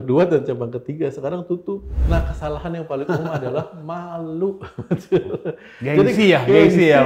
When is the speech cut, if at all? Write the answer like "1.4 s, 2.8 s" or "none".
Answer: 1.9 s